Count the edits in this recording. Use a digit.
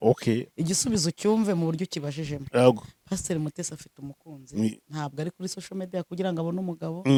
0